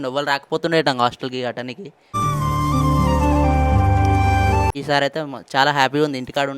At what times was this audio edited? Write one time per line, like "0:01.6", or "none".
0:04.6